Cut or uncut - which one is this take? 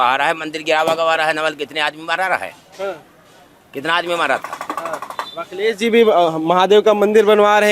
uncut